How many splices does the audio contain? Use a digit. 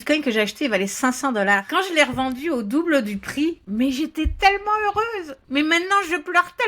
1